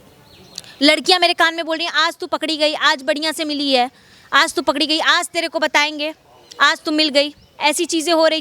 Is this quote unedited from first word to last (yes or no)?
no